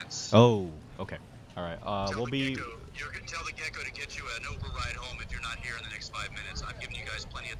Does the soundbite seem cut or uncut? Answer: uncut